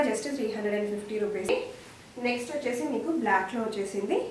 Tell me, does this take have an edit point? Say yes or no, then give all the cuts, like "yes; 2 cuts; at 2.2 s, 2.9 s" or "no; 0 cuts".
yes; 1 cut; at 1.5 s